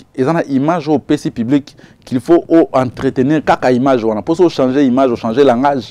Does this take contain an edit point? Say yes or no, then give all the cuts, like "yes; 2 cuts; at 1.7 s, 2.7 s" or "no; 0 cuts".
no; 0 cuts